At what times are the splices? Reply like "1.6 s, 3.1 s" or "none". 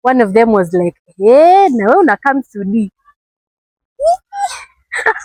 none